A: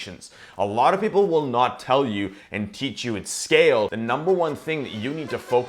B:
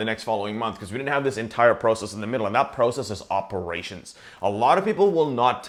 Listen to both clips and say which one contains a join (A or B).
A